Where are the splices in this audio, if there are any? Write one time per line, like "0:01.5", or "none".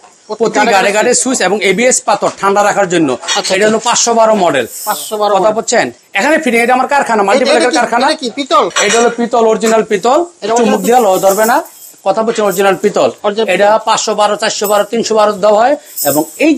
none